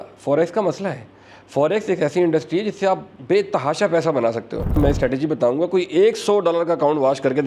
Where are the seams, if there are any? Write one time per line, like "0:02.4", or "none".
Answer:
0:03.1
0:04.7

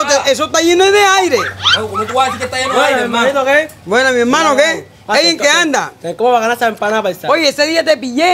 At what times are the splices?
none

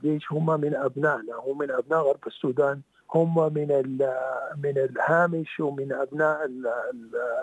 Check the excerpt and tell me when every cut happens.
0:02.9

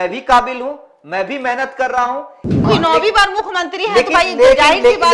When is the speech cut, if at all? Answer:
0:02.7

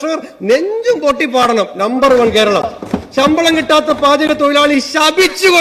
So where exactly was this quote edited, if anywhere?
none

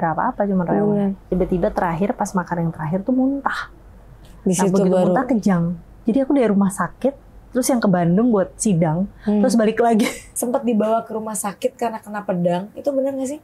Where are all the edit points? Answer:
0:01.3
0:06.0
0:10.2

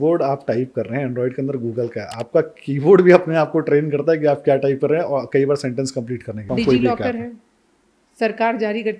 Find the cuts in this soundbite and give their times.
0:06.4

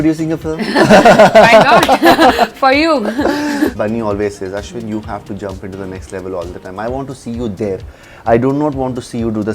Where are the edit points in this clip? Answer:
0:03.7

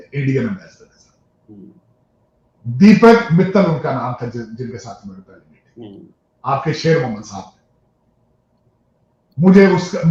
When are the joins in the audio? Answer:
none

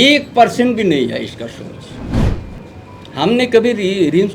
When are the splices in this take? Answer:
0:02.2

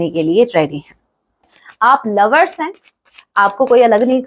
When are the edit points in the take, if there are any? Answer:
0:01.5

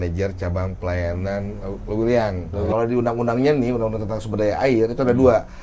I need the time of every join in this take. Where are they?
0:02.7

